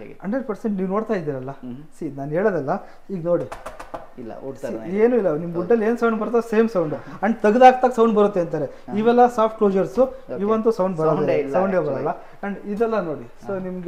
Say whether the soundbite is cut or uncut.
uncut